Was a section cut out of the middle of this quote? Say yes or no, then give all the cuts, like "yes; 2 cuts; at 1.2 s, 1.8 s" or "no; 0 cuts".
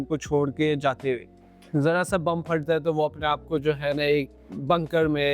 yes; 1 cut; at 1.4 s